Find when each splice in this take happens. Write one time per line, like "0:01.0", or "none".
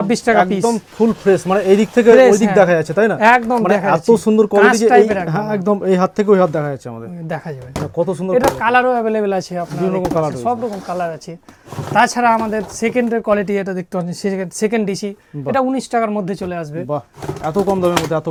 none